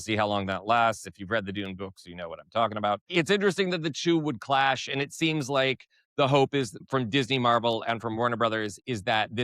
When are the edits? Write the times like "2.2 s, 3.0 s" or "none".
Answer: 6.8 s